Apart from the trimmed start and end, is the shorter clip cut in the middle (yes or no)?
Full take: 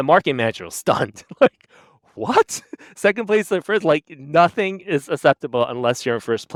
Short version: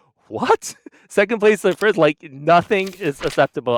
no